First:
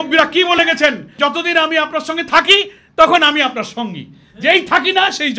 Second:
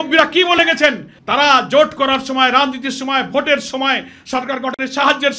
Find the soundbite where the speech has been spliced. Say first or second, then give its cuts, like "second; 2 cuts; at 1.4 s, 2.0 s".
first; 1 cut; at 1.1 s